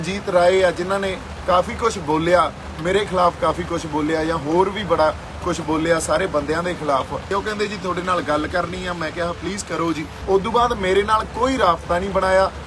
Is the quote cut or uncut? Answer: cut